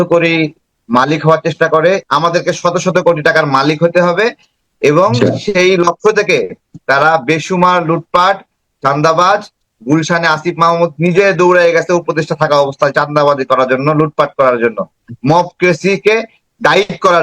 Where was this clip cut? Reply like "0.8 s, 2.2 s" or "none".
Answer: 2.0 s